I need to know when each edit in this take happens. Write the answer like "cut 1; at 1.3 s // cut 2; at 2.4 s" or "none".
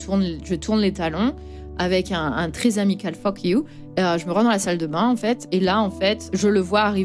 cut 1; at 3.8 s // cut 2; at 5.7 s